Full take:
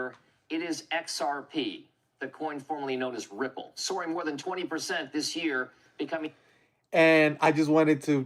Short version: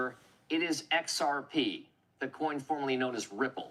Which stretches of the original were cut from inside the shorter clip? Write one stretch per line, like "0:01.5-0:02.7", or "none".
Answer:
none

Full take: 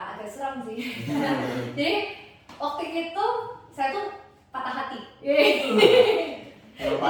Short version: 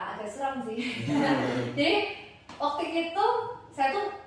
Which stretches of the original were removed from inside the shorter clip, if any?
none

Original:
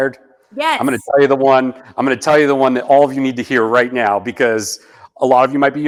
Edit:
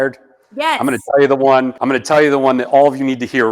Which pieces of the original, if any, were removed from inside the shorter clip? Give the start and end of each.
0:01.8-0:01.9

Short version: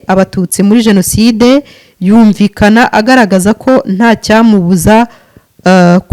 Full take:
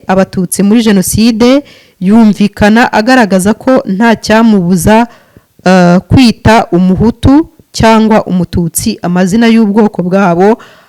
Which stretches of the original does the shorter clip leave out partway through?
none

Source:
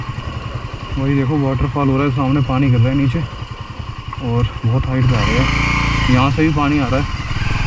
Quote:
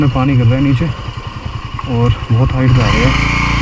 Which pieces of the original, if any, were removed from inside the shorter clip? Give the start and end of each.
none

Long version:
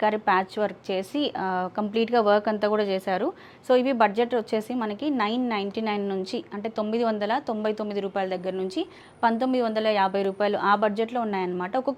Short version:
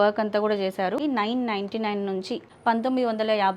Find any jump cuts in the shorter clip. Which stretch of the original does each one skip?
0:03.3-0:05.0
0:06.5-0:09.0

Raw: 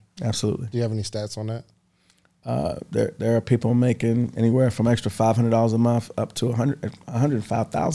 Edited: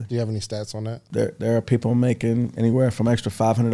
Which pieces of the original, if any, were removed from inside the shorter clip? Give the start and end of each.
0:01.7-0:02.8

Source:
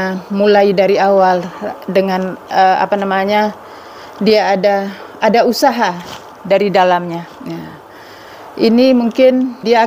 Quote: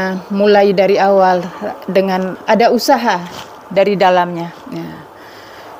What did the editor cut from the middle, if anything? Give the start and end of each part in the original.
0:02.3-0:05.1

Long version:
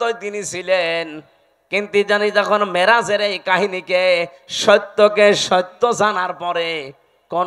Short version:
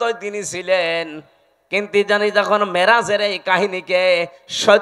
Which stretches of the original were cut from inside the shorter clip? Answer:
none

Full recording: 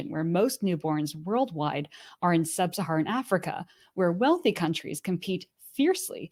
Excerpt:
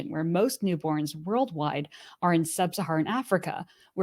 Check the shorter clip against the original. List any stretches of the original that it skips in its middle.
none

